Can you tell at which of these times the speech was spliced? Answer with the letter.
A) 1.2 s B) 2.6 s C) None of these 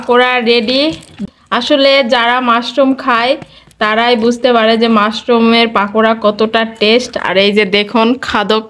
A